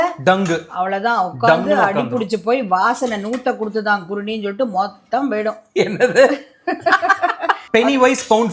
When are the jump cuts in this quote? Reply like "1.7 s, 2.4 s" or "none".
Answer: 7.6 s